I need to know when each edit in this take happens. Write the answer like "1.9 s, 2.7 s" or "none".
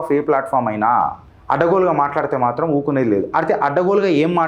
1.3 s